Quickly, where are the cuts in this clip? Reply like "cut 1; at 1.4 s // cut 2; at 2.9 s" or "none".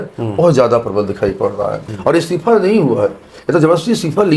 cut 1; at 1.9 s